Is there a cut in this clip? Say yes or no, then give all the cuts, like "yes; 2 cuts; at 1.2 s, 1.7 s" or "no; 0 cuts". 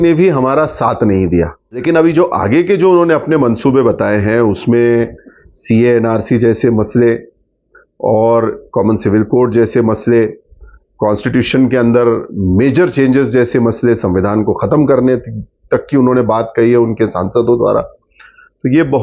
yes; 1 cut; at 1.8 s